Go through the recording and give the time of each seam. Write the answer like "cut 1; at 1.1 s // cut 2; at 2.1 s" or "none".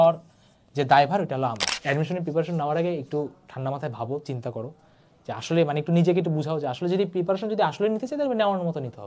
cut 1; at 1.7 s

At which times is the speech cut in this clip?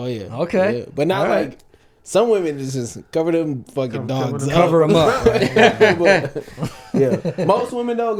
none

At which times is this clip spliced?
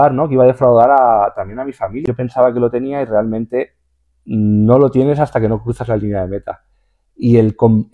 cut 1; at 2.0 s

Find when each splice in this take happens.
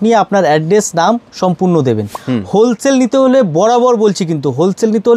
cut 1; at 2.1 s

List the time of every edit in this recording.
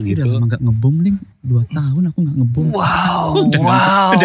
none

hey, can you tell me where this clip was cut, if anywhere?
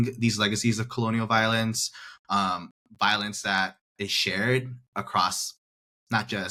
none

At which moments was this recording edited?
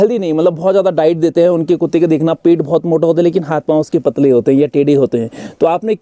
none

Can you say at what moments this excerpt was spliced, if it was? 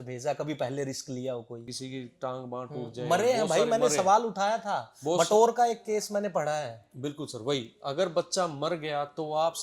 cut 1; at 1.6 s

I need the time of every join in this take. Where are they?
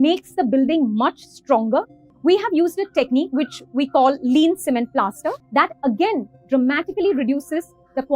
cut 1; at 2.0 s // cut 2; at 5.4 s

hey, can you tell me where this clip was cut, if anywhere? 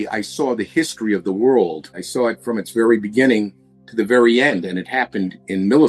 cut 1; at 2.0 s

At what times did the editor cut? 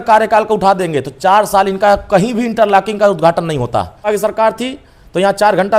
cut 1; at 4.0 s

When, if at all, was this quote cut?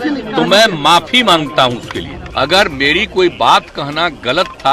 cut 1; at 2.2 s

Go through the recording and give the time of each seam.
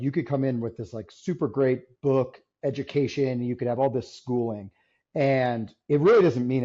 none

